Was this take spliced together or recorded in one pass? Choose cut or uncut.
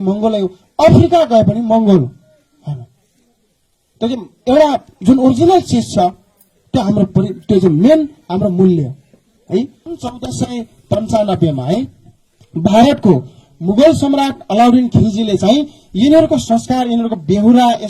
cut